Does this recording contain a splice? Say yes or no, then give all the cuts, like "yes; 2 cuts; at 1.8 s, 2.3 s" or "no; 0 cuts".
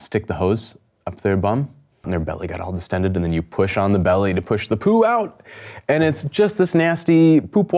yes; 1 cut; at 2.1 s